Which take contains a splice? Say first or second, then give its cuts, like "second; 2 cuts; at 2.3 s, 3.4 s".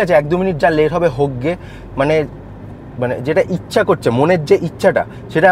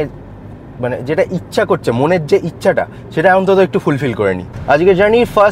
second; 1 cut; at 4.5 s